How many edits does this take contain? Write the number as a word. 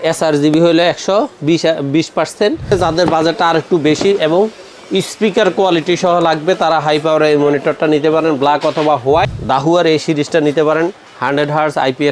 two